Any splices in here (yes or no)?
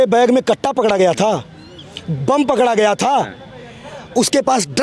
no